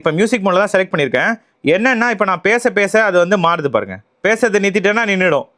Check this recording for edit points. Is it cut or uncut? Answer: cut